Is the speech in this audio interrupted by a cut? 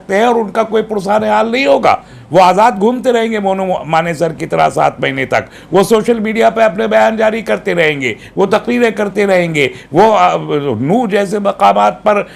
no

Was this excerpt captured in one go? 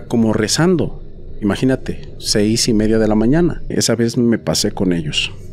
no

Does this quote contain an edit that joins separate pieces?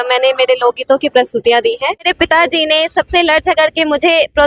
yes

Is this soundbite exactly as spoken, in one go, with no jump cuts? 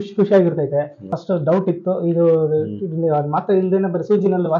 no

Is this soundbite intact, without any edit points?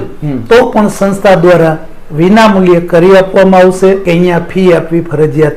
no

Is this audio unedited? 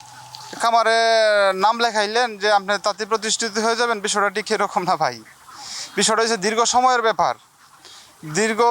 yes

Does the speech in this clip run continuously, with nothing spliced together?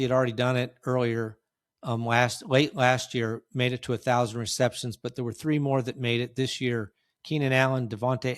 yes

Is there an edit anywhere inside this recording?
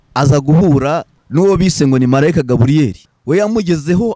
yes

